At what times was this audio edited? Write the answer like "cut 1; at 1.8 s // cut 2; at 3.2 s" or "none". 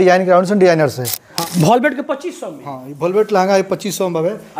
cut 1; at 1.4 s